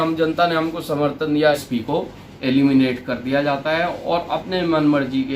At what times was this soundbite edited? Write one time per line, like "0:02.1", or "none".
0:01.6